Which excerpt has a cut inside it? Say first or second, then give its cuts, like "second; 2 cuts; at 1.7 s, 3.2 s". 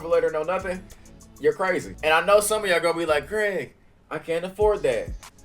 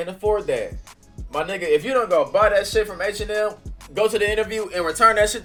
first; 1 cut; at 1.9 s